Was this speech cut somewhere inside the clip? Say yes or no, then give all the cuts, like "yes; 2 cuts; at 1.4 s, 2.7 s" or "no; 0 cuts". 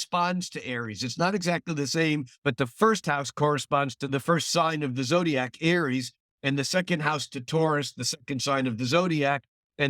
yes; 2 cuts; at 2.3 s, 4.0 s